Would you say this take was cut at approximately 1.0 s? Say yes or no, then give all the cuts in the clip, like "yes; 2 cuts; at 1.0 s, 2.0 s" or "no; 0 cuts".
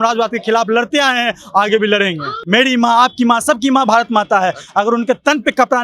no; 1 cut; at 2.3 s